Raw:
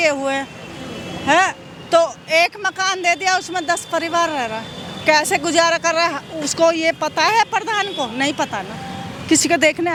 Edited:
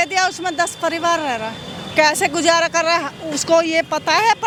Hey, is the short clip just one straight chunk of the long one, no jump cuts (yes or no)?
yes